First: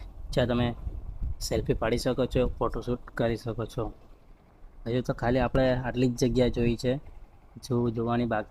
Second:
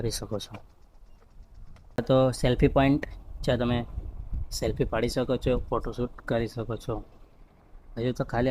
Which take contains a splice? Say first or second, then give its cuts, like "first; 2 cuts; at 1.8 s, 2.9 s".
second; 1 cut; at 2.0 s